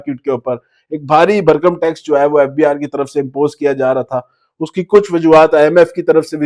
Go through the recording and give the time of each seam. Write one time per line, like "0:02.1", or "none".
none